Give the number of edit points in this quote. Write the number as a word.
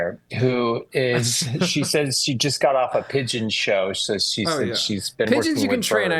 zero